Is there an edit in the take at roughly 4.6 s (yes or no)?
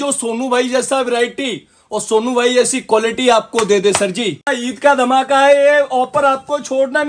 yes